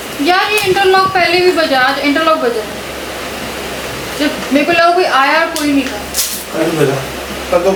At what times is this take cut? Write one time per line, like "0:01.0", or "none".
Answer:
none